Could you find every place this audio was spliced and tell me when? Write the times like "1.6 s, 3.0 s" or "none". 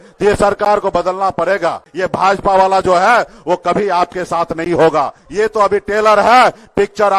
1.9 s, 5.2 s